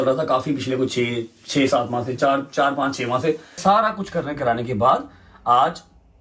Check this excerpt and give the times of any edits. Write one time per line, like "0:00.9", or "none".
0:03.6

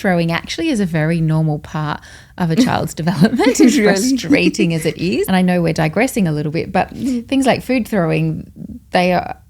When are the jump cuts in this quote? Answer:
0:05.3

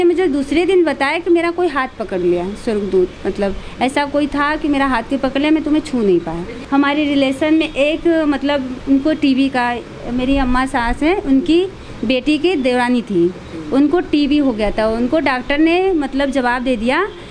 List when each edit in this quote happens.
0:06.5

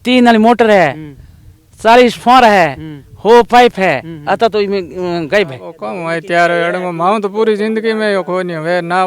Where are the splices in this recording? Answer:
0:05.7

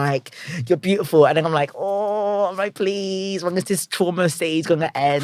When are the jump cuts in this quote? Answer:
none

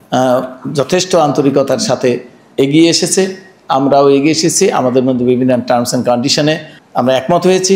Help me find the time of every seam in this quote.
0:02.4
0:06.8

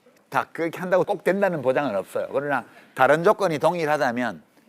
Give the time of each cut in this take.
0:01.1

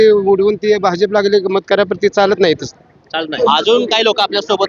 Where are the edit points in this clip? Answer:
none

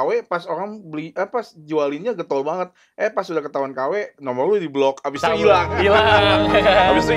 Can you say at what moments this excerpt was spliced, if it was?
none

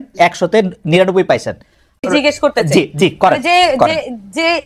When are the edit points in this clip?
0:02.0

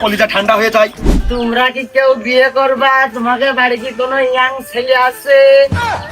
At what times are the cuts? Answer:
0:01.1

